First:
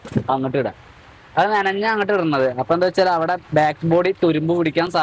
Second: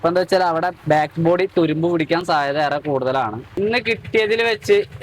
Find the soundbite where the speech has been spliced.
second; 1 cut; at 3.6 s

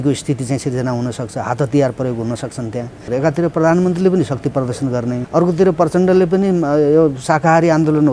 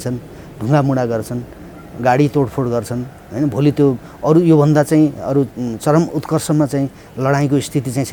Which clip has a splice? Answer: first; 2 cuts; at 3.0 s, 5.2 s

